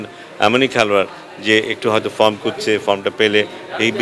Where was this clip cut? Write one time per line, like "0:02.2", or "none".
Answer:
none